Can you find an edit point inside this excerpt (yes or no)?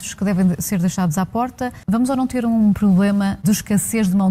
yes